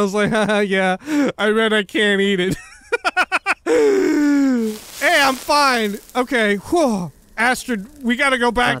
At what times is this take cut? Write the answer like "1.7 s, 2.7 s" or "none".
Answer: 4.9 s, 7.2 s